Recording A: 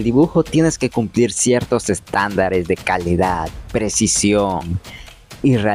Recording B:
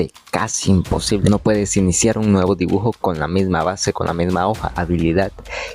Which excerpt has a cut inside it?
B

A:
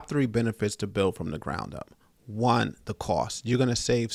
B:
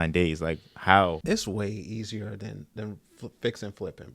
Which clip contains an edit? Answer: B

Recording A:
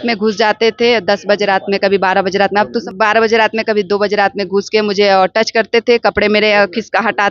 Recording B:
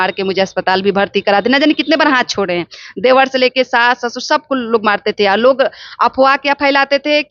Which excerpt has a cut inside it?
A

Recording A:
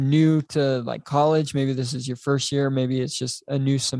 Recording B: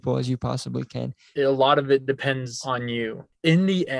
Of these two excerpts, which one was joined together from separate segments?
B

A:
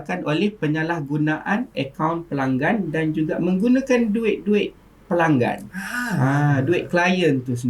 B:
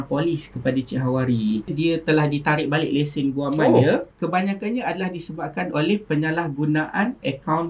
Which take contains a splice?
B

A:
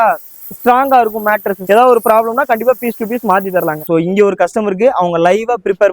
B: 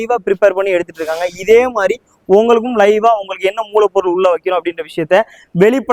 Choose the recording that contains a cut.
A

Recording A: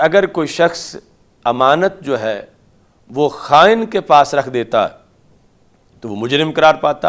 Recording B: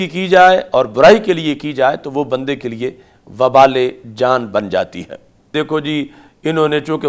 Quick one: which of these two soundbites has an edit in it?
B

